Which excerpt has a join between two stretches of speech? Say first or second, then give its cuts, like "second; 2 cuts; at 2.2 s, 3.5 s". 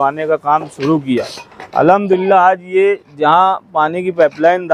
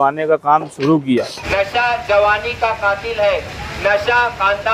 second; 1 cut; at 1.4 s